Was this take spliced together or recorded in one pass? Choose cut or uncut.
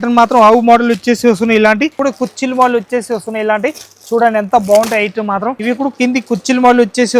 cut